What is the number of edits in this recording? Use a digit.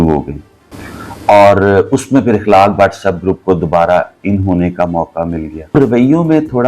1